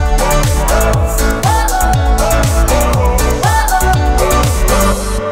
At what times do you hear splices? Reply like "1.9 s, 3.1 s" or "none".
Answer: none